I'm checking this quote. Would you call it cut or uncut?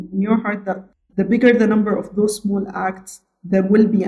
cut